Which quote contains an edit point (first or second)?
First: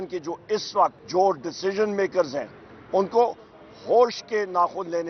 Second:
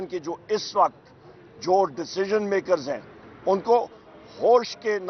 first